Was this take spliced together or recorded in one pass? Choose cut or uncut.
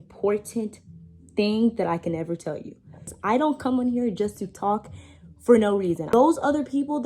cut